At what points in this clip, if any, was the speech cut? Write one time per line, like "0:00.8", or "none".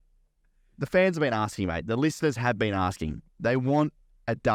none